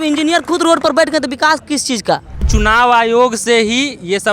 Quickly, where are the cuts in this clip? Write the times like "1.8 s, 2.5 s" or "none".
2.5 s